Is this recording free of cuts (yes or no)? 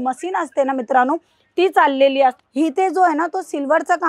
no